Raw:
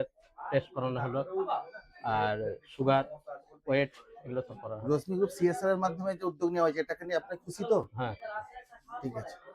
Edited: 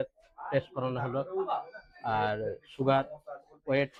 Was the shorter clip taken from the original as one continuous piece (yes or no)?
yes